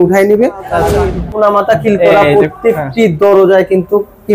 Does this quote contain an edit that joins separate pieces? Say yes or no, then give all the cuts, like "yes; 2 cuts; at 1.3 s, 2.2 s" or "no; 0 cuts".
yes; 1 cut; at 0.9 s